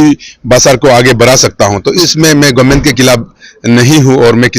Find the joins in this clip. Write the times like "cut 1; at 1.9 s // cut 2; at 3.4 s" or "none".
cut 1; at 2.0 s